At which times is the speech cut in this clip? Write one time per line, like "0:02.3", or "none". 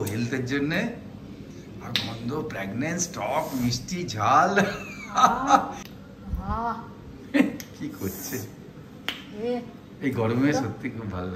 0:05.8